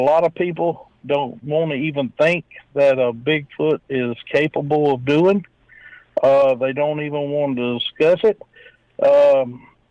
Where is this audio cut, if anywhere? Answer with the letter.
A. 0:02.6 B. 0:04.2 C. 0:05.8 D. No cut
D